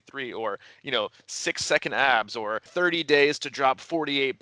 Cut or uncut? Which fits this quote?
cut